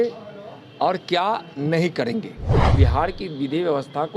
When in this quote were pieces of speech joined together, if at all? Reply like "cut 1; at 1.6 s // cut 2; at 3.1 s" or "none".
cut 1; at 2.6 s